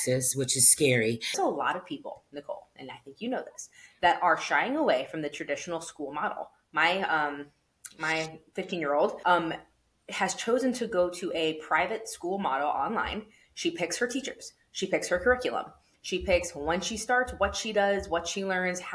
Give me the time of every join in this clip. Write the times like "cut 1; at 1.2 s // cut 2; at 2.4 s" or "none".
cut 1; at 1.3 s // cut 2; at 9.2 s